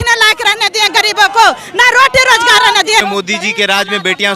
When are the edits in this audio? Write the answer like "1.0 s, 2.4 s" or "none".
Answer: 3.2 s

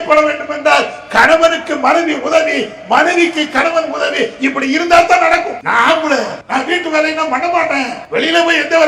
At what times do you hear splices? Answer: 5.6 s, 6.4 s, 8.0 s

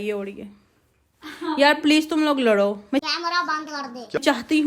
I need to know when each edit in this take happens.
none

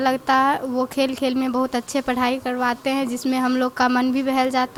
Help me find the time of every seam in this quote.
none

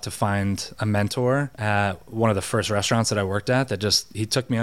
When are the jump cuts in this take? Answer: none

